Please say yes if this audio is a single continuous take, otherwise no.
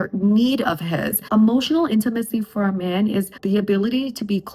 no